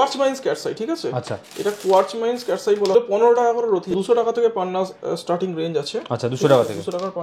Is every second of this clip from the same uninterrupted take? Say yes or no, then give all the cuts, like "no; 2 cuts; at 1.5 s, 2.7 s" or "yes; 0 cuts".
no; 2 cuts; at 2.9 s, 3.9 s